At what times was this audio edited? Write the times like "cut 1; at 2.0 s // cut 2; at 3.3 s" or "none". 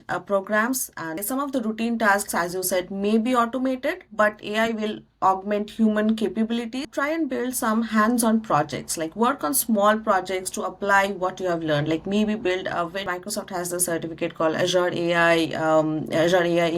cut 1; at 1.2 s // cut 2; at 6.8 s // cut 3; at 13.1 s

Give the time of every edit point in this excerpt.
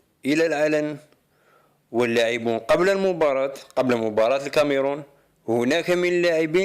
cut 1; at 4.5 s

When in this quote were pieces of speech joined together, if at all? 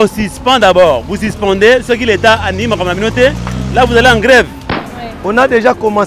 cut 1; at 4.8 s

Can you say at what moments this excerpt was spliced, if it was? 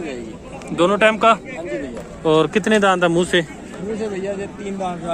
none

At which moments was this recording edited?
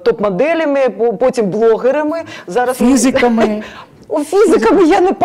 none

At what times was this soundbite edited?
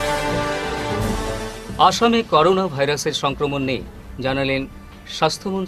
none

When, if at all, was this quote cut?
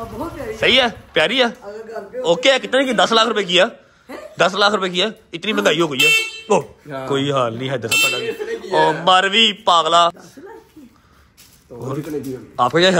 none

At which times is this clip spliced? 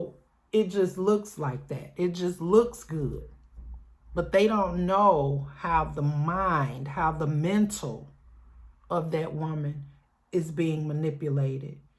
none

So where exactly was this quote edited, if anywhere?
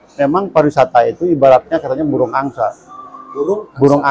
none

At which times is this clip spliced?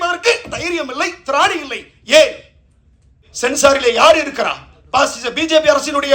cut 1; at 3.3 s

